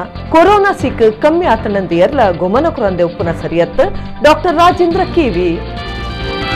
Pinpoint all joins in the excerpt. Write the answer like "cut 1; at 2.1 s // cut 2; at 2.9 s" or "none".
none